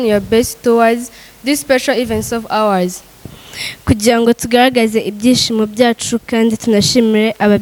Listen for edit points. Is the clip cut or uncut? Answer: uncut